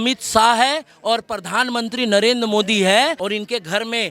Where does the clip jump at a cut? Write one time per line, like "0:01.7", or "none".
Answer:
0:03.2

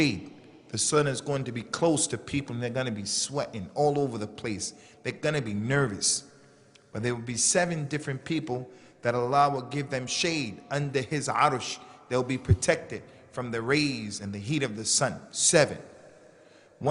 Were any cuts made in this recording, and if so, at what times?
0:04.0

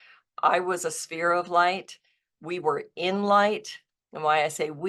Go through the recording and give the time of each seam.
none

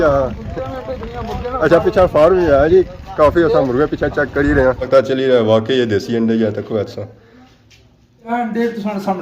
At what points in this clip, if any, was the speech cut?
0:04.8
0:08.3

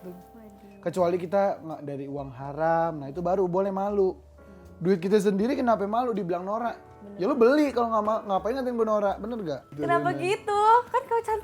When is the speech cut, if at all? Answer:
0:09.8

